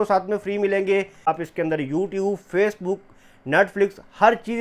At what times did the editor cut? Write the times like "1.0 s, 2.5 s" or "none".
1.3 s